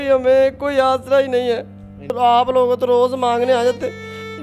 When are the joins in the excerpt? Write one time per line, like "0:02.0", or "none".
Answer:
0:02.1